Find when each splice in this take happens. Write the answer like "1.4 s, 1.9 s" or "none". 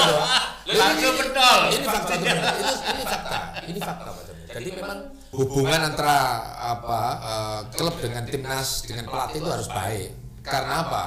5.3 s

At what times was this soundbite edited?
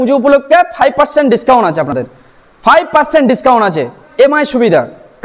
none

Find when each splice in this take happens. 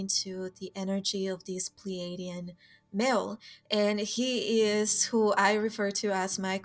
none

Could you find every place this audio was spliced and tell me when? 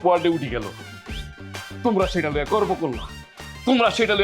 1.7 s

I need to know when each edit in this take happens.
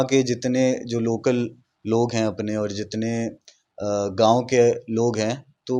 none

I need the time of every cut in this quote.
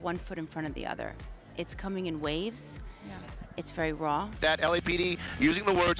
4.3 s

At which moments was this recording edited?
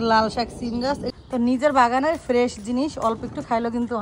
1.1 s

